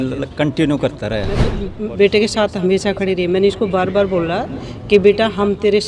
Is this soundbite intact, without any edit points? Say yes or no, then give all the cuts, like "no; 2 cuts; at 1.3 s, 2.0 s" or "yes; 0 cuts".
no; 1 cut; at 1.7 s